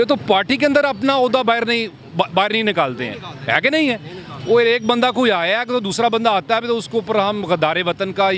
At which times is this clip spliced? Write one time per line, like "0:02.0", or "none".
none